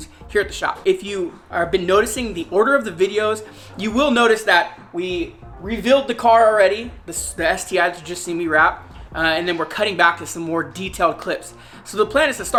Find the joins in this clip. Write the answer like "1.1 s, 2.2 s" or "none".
none